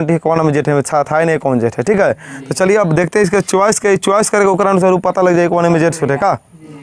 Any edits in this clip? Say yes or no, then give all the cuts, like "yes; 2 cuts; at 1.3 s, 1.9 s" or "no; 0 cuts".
no; 0 cuts